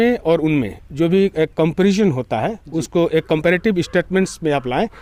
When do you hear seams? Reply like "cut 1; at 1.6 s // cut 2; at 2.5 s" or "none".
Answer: none